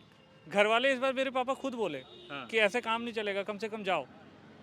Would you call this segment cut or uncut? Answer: uncut